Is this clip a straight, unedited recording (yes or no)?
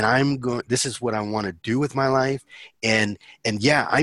yes